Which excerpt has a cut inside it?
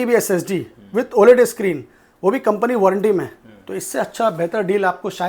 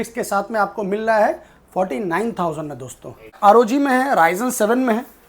second; 1 cut; at 3.3 s

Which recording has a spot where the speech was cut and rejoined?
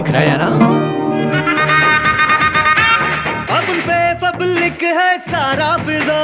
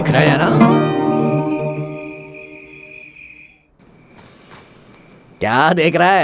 first; 1 cut; at 1.7 s

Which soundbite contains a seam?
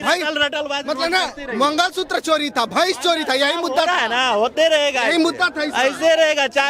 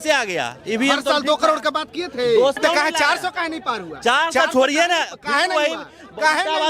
second; 1 cut; at 2.6 s

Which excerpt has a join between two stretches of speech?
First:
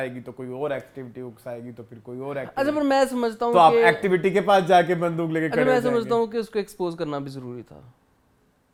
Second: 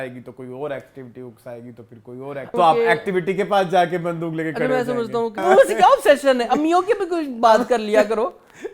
second; 2 cuts; at 2.5 s, 5.4 s

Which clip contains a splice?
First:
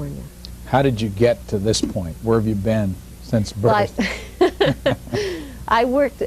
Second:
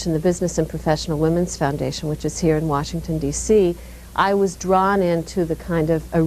second; 1 cut; at 3.2 s

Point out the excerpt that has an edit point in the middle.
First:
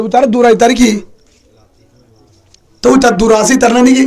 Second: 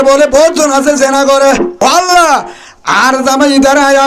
second; 1 cut; at 1.7 s

